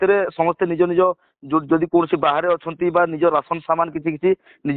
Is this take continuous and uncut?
yes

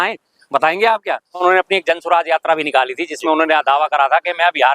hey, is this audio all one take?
no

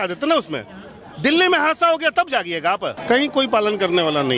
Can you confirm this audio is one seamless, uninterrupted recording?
no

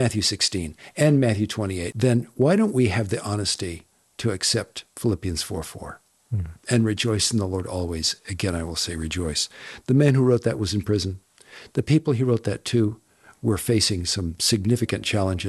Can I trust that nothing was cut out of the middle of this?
no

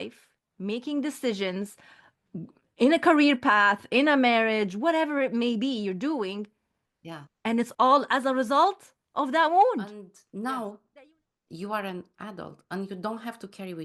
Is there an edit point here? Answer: yes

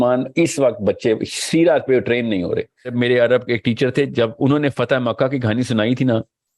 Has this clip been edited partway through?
yes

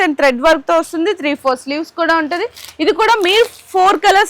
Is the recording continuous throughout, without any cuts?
yes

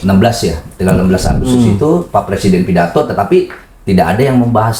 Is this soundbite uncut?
yes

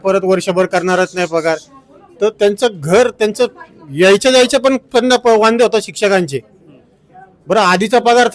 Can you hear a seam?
no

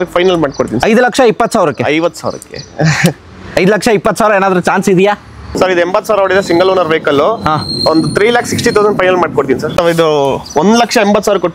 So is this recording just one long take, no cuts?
no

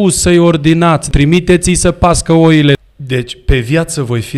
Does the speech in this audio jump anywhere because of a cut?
yes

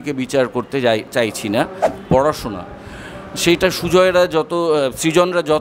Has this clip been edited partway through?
yes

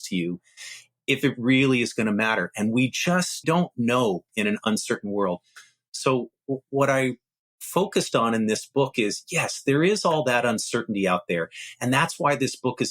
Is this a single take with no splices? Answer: no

